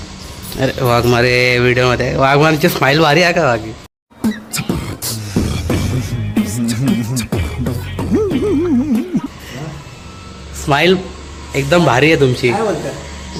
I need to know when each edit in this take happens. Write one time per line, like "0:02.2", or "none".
none